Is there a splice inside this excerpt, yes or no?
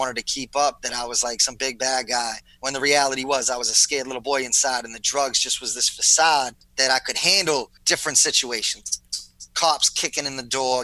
yes